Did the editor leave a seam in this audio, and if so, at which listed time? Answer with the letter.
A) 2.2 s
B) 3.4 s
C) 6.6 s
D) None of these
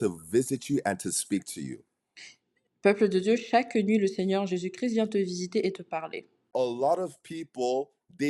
C